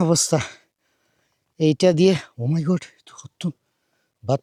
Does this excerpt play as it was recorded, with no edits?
yes; 0 cuts

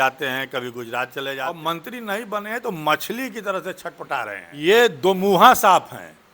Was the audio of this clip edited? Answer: yes; 2 cuts; at 1.4 s, 4.4 s

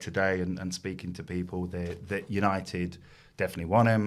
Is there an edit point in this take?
no; 0 cuts

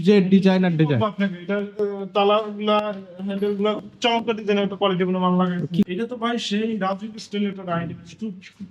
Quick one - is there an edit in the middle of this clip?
yes; 1 cut; at 5.9 s

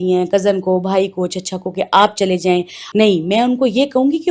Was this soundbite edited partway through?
yes; 1 cut; at 2.8 s

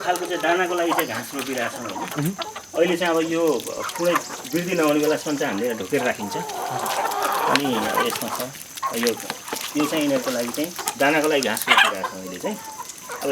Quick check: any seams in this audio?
no; 0 cuts

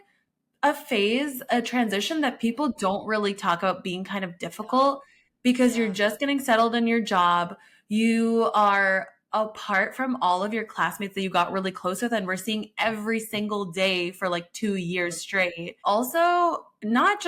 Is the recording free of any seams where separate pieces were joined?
yes; 0 cuts

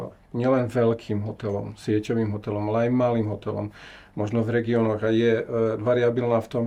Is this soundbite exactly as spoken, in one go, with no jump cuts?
yes; 0 cuts

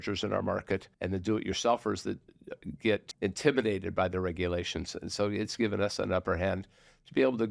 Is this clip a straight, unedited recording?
no; 2 cuts; at 0.9 s, 3.1 s

